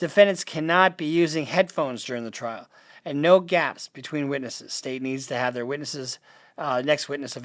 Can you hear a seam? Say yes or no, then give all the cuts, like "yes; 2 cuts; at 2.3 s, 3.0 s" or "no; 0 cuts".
no; 0 cuts